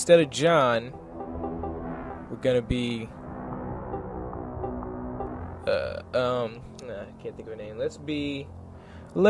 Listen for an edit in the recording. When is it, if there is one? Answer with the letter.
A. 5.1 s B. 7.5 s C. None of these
B